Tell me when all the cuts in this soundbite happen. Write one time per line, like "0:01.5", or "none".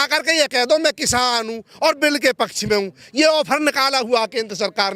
none